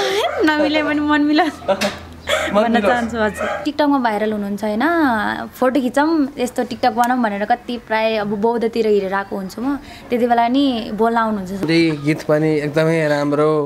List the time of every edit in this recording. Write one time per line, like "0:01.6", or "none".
0:03.6
0:11.6